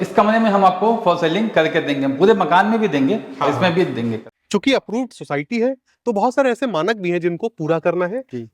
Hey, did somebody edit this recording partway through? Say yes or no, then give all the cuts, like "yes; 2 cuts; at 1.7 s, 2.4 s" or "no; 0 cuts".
yes; 1 cut; at 4.3 s